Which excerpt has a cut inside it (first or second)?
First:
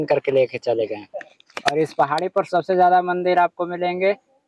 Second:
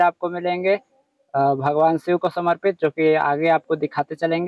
first